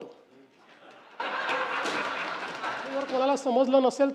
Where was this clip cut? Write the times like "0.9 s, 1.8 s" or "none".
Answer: 3.1 s